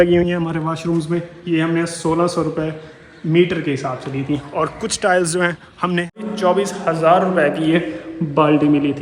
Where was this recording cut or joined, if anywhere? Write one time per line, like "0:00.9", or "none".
0:06.3